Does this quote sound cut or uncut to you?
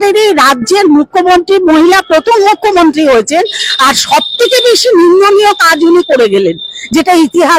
uncut